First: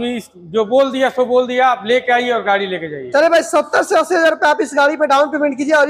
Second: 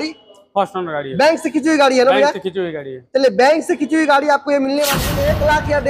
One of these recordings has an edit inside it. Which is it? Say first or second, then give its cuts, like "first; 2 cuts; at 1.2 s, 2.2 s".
second; 1 cut; at 4.9 s